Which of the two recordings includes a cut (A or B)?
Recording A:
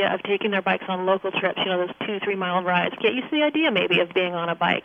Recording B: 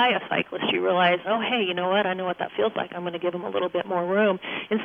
A